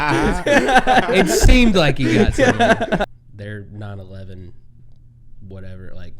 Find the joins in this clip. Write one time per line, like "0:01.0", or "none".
0:03.1

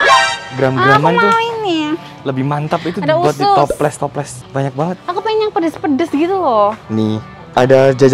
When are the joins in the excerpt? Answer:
none

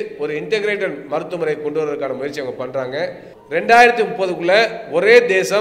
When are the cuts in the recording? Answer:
0:03.3

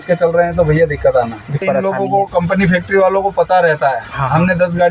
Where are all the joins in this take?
0:01.6

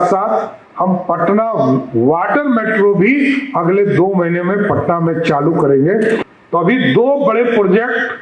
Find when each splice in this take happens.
0:06.3

